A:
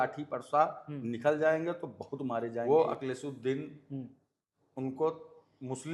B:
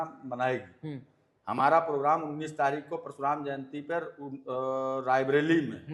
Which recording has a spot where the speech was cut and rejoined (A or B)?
A